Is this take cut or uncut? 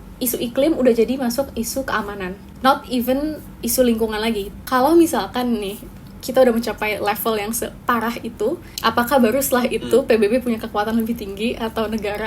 cut